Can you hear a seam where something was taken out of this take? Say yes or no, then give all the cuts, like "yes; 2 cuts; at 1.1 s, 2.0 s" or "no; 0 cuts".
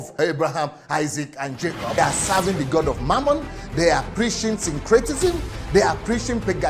yes; 1 cut; at 2.0 s